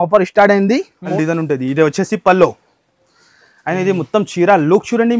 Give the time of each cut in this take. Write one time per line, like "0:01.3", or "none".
0:01.1